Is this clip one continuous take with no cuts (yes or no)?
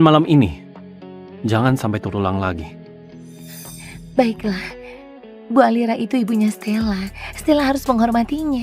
no